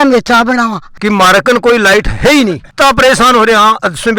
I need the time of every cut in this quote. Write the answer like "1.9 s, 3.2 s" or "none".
0.9 s

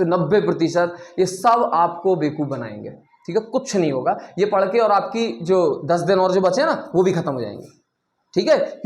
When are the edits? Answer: 2.8 s

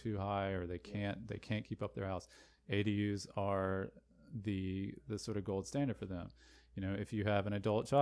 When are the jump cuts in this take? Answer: none

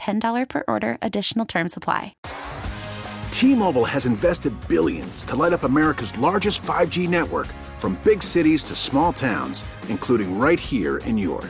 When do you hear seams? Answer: 2.2 s

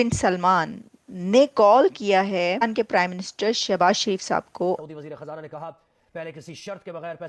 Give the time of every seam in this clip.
2.6 s, 4.8 s

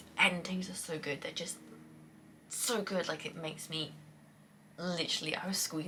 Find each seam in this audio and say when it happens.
none

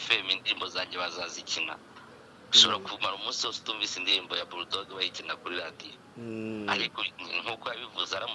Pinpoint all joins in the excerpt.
none

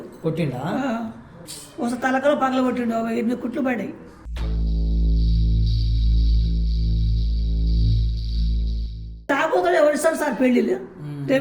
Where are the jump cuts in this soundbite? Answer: 9.3 s

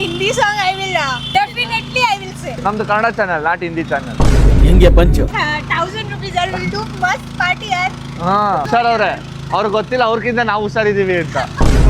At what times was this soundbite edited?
5.3 s, 8.6 s

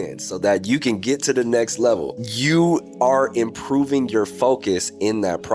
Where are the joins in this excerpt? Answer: none

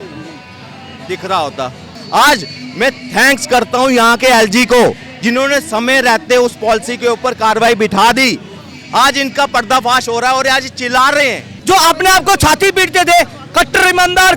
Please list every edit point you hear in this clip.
2.0 s, 11.5 s

